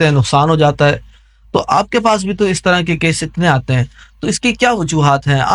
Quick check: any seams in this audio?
no; 0 cuts

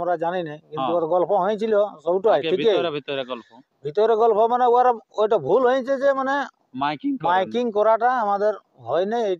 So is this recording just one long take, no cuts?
yes; 0 cuts

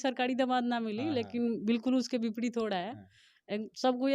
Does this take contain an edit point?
no; 0 cuts

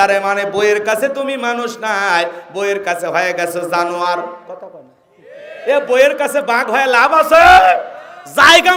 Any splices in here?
no; 0 cuts

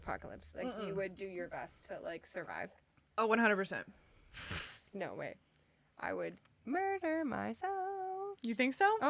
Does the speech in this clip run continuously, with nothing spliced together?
yes; 0 cuts

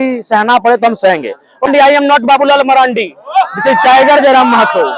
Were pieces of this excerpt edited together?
yes; 1 cut; at 1.7 s

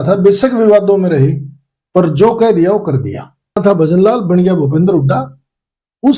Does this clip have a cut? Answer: yes; 1 cut; at 3.6 s

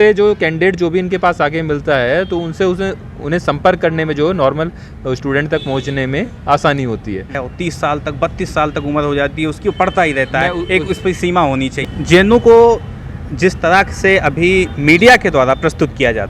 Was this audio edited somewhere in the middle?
yes; 2 cuts; at 7.4 s, 11.8 s

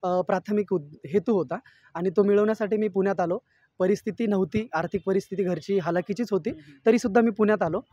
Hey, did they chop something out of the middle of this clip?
no; 0 cuts

